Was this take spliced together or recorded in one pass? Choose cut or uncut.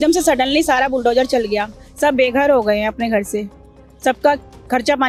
uncut